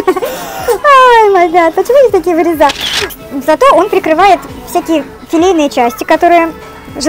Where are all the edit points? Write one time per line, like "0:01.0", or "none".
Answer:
0:03.1